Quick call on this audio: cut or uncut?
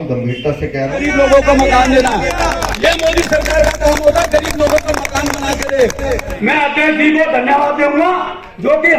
cut